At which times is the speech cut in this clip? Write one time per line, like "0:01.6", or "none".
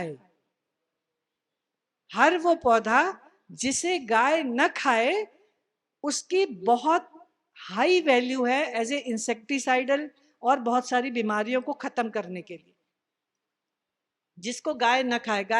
none